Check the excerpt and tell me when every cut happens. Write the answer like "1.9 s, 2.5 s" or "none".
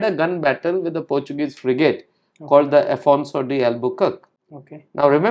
none